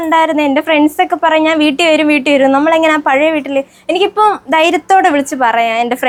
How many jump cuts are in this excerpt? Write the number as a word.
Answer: zero